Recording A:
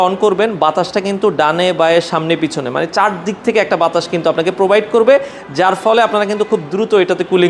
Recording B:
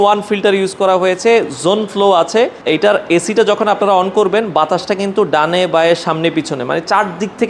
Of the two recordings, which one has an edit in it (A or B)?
B